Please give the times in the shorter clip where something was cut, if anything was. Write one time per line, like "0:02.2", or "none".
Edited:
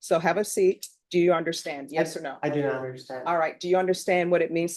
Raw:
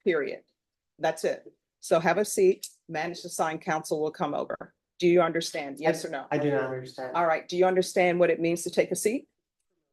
0:00.9